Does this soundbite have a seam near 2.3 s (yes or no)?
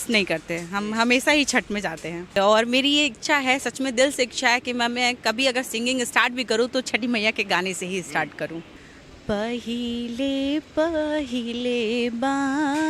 yes